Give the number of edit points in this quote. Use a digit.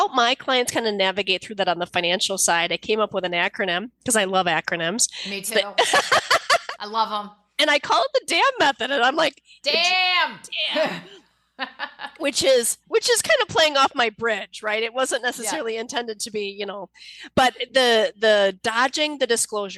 0